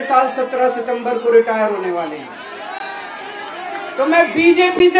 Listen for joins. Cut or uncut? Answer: uncut